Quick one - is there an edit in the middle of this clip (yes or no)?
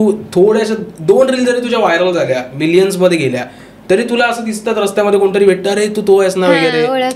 no